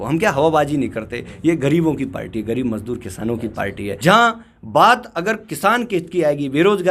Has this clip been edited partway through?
yes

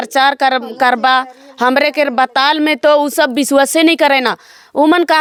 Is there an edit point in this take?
no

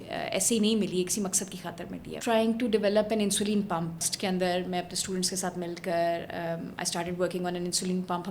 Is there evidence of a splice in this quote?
yes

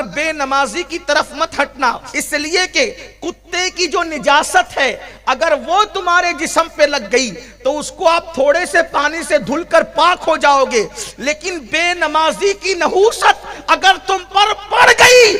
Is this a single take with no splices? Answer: no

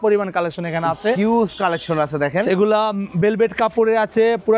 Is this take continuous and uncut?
yes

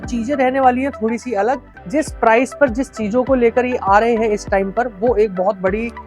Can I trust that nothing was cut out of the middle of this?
no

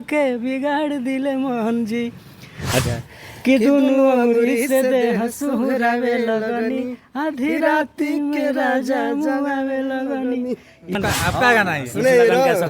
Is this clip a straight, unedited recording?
no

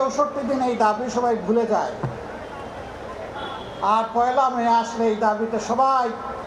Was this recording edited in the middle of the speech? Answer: no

